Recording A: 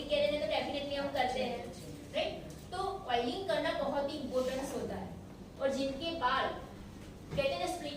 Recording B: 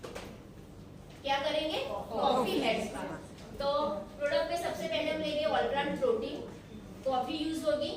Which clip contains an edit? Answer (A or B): A